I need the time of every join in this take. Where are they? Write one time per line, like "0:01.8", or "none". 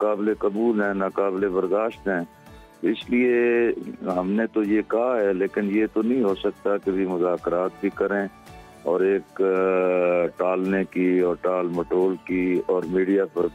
none